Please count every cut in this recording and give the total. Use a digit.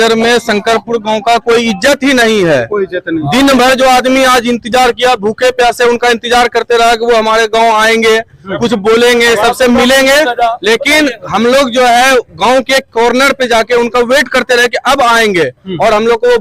0